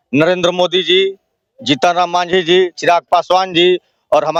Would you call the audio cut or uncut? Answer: uncut